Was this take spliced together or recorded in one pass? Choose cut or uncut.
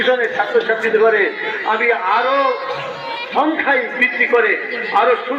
uncut